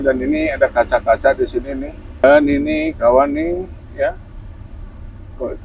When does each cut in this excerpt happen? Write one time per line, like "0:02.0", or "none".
0:02.2